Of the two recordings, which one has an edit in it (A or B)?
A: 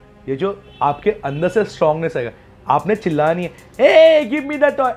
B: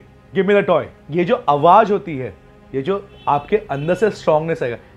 B